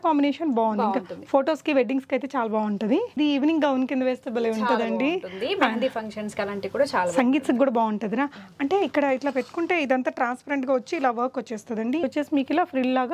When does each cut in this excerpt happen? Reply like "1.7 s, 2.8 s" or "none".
3.2 s, 12.0 s